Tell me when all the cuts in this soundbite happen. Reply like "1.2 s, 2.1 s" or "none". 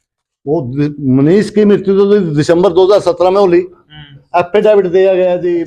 none